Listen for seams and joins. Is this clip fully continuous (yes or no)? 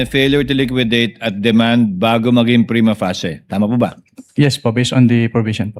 yes